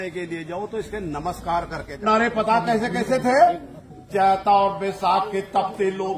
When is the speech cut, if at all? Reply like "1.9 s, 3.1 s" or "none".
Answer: 2.0 s